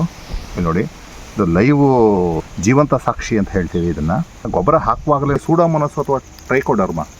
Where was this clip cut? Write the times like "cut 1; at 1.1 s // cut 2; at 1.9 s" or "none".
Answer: cut 1; at 2.4 s // cut 2; at 4.5 s // cut 3; at 5.4 s